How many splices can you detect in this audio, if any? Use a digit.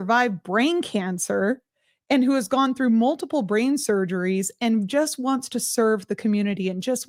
0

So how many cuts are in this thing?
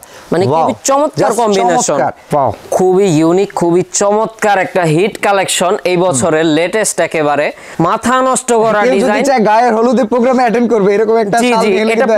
2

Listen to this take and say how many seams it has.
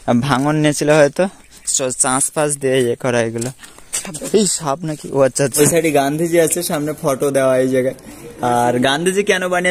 1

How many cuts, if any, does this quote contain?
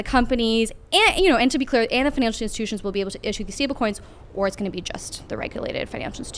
0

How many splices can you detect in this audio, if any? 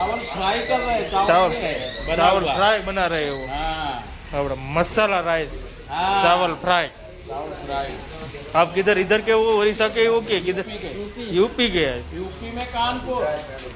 0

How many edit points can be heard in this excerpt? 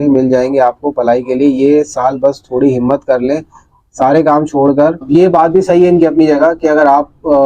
1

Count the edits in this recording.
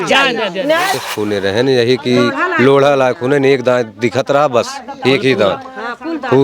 1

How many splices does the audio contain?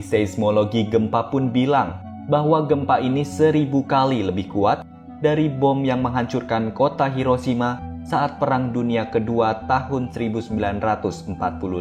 0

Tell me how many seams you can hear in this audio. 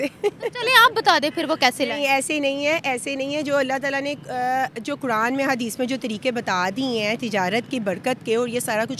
0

